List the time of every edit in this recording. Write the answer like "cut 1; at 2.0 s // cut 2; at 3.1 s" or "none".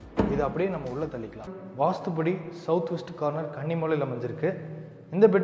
cut 1; at 1.5 s